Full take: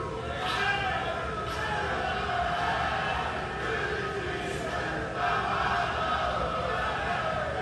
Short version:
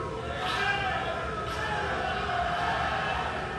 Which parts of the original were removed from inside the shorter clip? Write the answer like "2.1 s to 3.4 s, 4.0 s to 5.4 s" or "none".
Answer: none